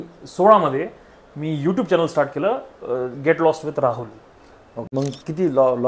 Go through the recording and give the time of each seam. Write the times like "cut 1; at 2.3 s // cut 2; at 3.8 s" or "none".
cut 1; at 4.9 s